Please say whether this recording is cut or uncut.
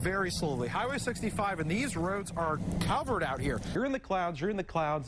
cut